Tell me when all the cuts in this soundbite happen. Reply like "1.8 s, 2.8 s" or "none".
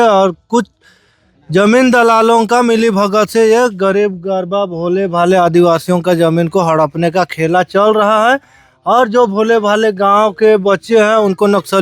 none